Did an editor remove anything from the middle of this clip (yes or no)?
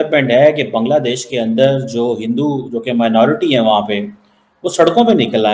no